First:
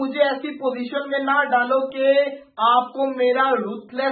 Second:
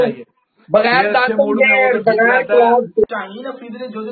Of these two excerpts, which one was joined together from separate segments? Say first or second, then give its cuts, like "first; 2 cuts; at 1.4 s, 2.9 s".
second; 1 cut; at 3.0 s